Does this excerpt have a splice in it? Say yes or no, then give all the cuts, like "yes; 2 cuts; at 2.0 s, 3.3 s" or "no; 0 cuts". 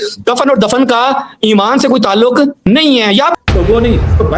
yes; 1 cut; at 3.3 s